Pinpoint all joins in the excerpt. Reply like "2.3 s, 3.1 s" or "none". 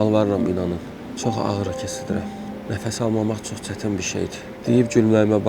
1.1 s, 2.4 s, 4.5 s